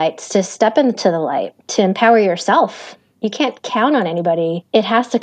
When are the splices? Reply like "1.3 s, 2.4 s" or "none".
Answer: none